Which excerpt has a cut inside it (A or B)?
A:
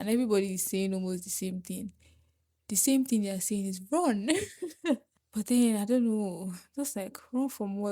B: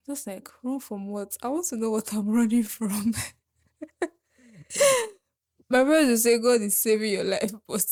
A